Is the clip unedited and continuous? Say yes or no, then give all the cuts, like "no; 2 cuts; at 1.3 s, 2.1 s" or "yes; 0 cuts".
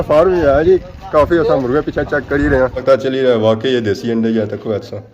no; 1 cut; at 2.8 s